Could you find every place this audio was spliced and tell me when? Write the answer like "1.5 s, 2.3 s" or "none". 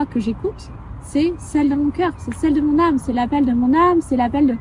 none